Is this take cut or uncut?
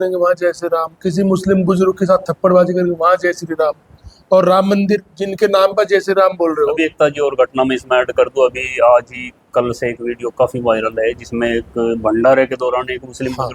uncut